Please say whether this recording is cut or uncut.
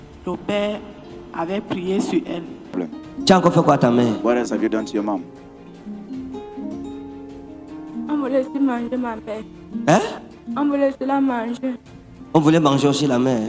uncut